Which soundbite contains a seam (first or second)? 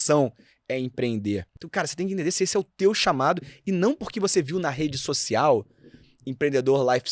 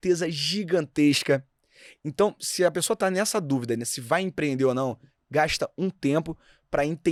first